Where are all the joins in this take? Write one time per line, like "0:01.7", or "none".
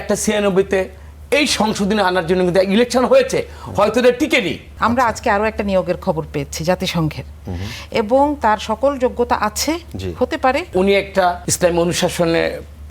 0:04.7
0:11.1